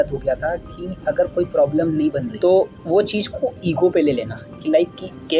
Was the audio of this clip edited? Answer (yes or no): no